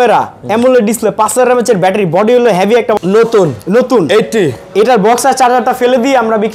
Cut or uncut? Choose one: cut